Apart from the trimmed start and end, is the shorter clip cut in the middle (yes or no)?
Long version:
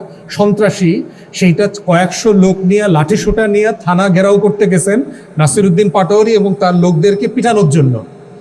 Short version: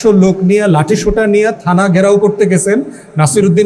no